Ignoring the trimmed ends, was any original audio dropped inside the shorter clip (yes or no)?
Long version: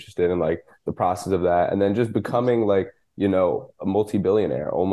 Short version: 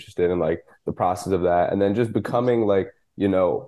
no